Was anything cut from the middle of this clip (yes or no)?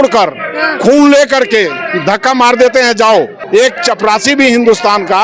yes